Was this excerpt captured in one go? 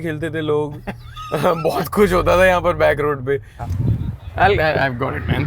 no; 1 cut; at 3.5 s

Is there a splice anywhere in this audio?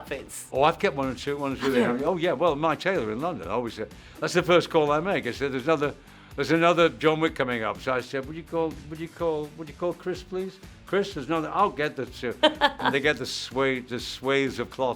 no; 0 cuts

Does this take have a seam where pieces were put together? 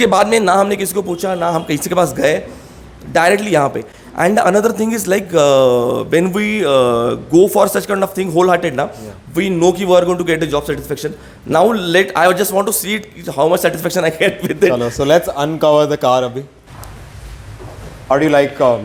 no; 0 cuts

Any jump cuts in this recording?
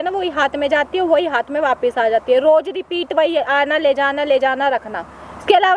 no; 0 cuts

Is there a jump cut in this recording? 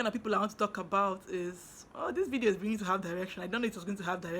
no; 0 cuts

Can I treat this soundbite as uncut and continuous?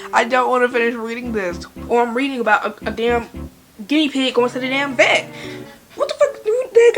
no; 1 cut; at 1.7 s

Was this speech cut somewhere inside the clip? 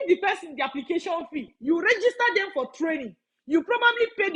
no; 0 cuts

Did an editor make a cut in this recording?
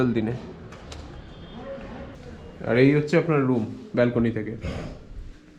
yes; 1 cut; at 2.2 s

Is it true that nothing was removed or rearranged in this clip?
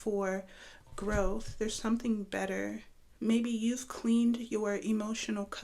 no; 1 cut; at 3.0 s

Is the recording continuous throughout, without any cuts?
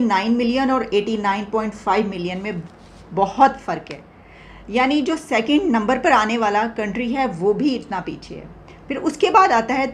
yes; 0 cuts

